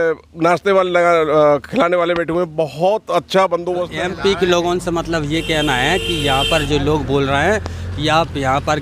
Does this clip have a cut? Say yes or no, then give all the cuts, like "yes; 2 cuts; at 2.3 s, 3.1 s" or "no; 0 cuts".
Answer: yes; 1 cut; at 3.9 s